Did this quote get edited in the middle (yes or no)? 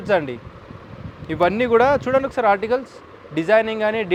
no